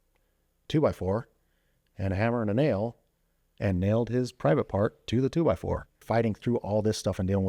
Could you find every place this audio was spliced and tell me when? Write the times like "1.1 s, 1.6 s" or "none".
6.0 s

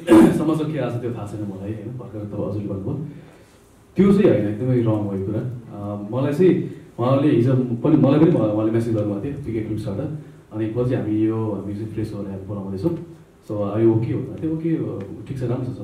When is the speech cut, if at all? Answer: none

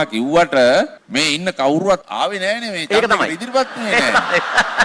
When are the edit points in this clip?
1.0 s, 2.1 s

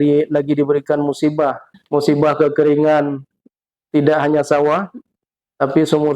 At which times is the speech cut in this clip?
1.7 s

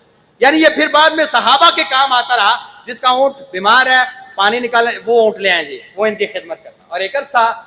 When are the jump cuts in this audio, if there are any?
none

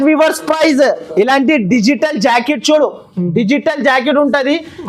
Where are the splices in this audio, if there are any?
none

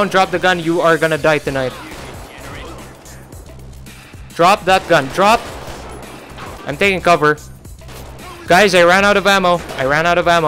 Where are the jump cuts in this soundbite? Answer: none

